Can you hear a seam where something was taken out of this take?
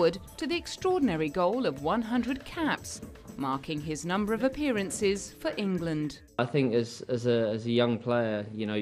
yes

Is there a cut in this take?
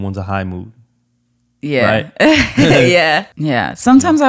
yes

